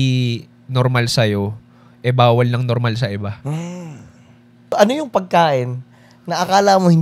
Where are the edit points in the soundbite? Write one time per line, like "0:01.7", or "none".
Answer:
0:04.7